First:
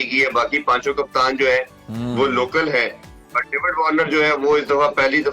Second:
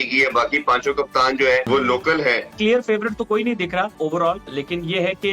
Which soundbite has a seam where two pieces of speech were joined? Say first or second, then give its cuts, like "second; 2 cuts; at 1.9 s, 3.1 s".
second; 3 cuts; at 1.7 s, 2.6 s, 4.3 s